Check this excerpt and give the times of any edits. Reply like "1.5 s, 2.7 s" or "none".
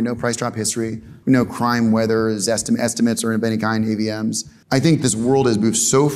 1.1 s, 4.5 s